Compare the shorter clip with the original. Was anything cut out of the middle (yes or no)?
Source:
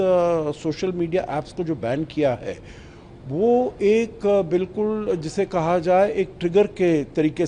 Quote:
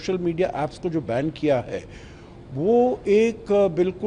no